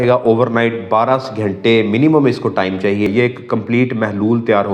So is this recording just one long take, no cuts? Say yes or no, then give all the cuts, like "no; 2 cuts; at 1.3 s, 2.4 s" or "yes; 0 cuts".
no; 1 cut; at 3.1 s